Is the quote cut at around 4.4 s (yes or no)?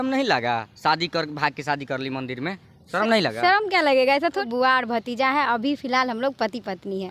yes